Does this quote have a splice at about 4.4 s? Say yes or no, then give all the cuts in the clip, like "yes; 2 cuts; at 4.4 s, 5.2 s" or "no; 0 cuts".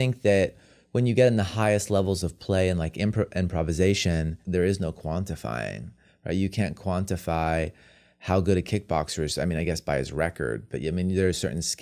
yes; 1 cut; at 4.4 s